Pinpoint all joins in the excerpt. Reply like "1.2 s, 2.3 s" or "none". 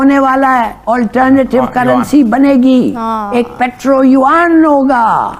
none